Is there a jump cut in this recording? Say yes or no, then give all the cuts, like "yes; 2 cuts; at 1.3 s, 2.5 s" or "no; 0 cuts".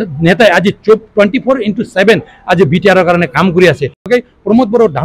yes; 1 cut; at 4.0 s